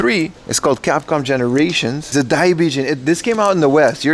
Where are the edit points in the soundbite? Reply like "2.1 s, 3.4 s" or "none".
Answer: 2.1 s